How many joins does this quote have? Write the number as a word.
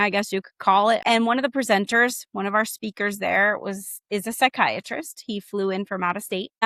one